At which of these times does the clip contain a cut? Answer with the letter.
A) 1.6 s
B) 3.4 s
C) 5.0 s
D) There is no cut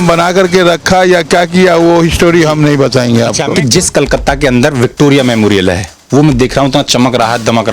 B